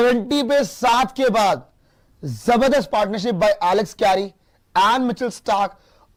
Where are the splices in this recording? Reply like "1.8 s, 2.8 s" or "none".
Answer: none